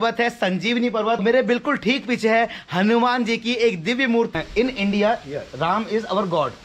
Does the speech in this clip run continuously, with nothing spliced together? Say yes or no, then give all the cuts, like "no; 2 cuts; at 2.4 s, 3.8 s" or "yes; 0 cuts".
no; 2 cuts; at 1.2 s, 4.3 s